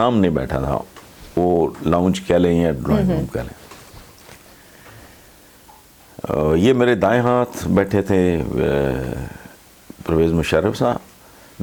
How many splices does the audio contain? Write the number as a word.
zero